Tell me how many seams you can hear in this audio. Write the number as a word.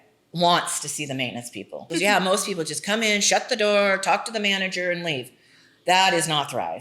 one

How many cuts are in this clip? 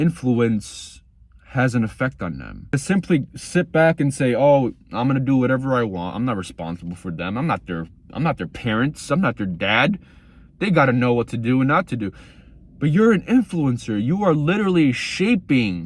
one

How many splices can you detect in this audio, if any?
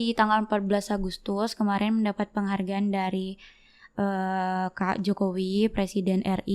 zero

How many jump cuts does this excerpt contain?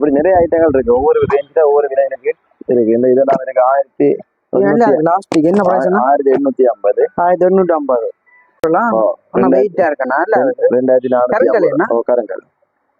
one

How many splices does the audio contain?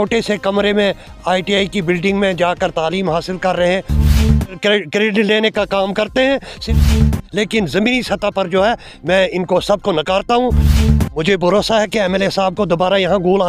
three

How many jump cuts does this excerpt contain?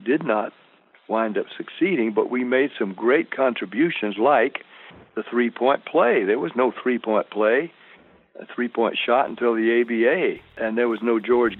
one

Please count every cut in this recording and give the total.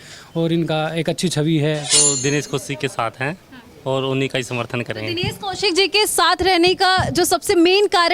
one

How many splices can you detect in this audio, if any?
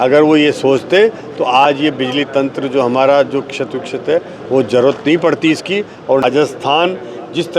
one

